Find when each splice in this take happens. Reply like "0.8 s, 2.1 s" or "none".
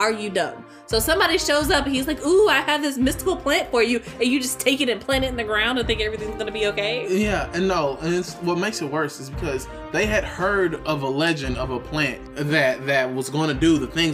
12.2 s